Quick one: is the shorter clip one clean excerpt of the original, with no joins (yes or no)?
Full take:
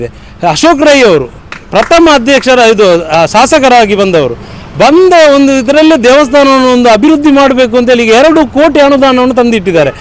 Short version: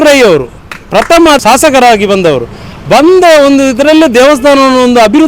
no